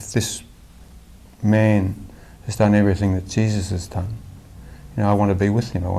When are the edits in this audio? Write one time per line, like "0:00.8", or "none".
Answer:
none